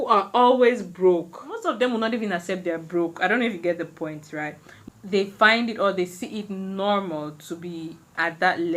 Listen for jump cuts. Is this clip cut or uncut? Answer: cut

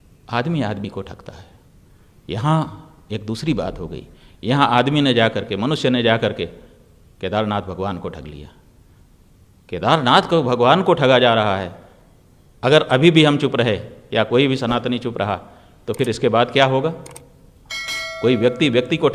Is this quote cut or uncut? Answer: uncut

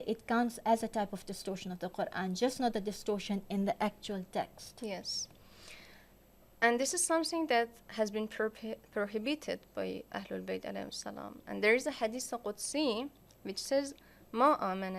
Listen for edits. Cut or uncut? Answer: uncut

